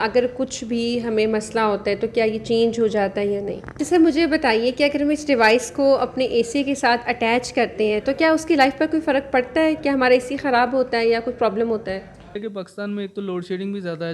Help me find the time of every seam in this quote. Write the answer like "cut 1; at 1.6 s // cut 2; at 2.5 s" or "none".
cut 1; at 3.6 s // cut 2; at 12.4 s